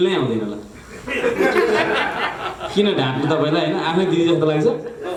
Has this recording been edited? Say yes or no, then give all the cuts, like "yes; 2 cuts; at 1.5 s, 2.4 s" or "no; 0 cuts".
no; 0 cuts